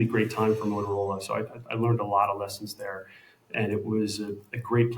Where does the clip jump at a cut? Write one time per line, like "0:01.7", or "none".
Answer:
none